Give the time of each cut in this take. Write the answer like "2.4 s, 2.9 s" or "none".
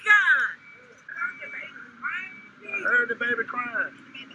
1.1 s